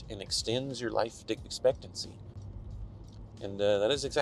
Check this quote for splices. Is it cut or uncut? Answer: uncut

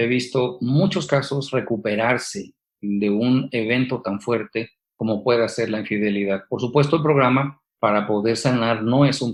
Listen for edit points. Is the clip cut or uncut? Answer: uncut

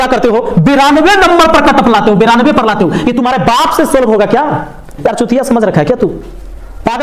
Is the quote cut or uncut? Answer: cut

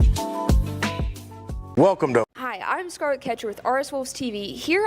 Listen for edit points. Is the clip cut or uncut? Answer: cut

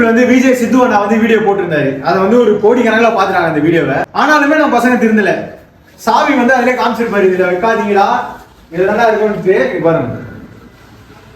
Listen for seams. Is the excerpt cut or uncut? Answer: cut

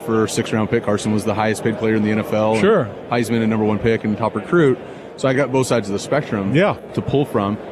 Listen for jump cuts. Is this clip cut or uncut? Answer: cut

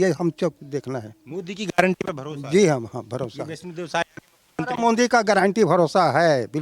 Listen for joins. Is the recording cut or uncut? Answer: uncut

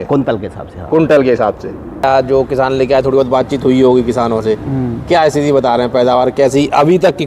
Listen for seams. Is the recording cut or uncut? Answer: cut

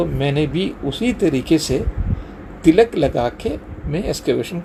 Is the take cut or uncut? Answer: uncut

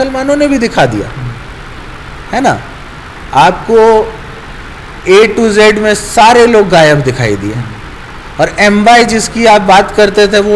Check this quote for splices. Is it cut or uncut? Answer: uncut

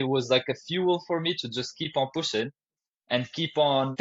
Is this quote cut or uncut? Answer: uncut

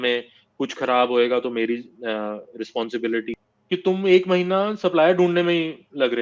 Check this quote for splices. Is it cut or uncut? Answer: cut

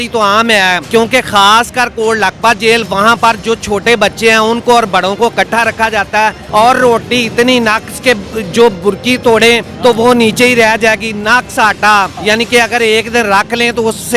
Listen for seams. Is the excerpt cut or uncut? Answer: cut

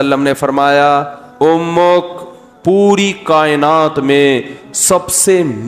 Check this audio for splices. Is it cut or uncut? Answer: uncut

